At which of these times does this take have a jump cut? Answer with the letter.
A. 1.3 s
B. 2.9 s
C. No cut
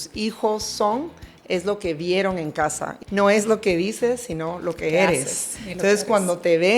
B